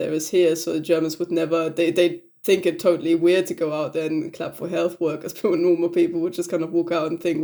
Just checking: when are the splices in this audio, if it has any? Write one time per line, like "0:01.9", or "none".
none